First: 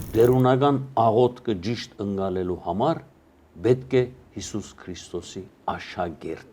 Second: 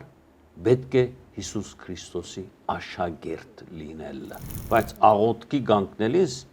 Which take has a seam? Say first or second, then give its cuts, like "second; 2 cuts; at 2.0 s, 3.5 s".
second; 1 cut; at 4.5 s